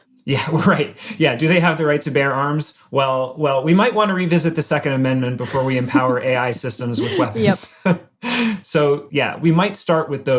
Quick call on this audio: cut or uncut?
cut